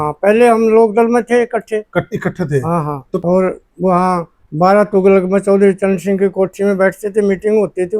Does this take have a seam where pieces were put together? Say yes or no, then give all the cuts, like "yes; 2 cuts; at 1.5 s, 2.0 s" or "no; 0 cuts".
yes; 1 cut; at 3.2 s